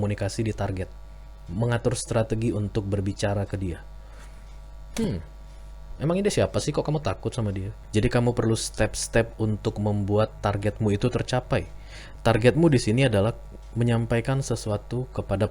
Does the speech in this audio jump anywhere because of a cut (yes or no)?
yes